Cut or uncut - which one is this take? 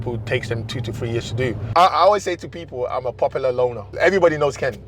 cut